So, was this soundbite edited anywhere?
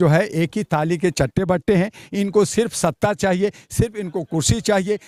no; 0 cuts

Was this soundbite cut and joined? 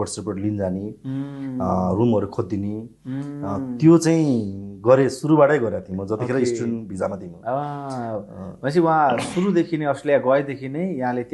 no; 0 cuts

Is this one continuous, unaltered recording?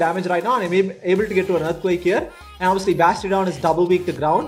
yes; 0 cuts

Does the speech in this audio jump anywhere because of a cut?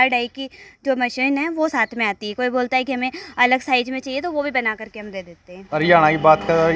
yes; 1 cut; at 5.7 s

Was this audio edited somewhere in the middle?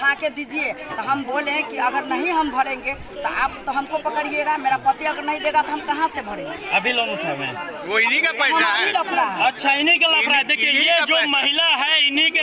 no; 0 cuts

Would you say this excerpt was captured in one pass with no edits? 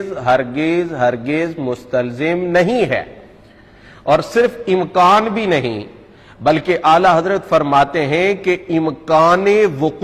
yes; 0 cuts

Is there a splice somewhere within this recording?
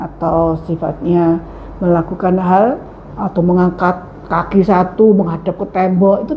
no; 0 cuts

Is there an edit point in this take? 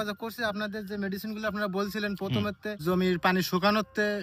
yes; 1 cut; at 2.8 s

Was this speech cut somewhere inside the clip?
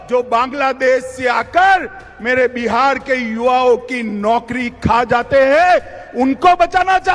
no; 0 cuts

